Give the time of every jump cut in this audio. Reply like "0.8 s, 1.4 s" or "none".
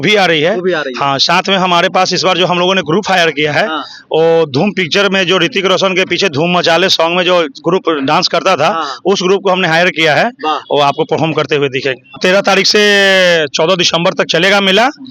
12.2 s